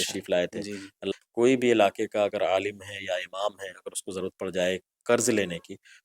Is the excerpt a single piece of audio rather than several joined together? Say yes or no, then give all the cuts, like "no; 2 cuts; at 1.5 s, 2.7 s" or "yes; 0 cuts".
no; 1 cut; at 1.0 s